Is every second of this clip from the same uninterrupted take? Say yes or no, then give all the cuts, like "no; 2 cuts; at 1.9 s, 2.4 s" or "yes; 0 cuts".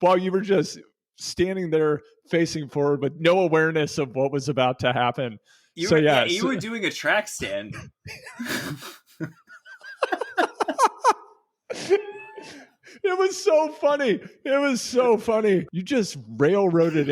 no; 1 cut; at 15.8 s